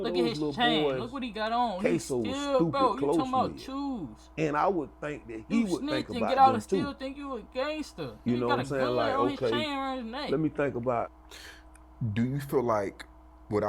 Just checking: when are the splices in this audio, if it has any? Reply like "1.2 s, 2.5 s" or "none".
11.2 s